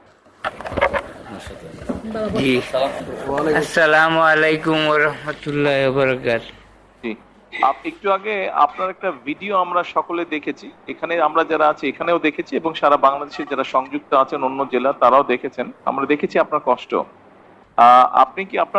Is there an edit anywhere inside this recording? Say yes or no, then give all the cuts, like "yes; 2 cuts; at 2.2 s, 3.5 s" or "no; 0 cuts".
no; 0 cuts